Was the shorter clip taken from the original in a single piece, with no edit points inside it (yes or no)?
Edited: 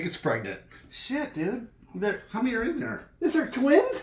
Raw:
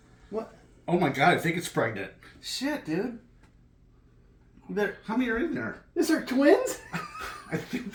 no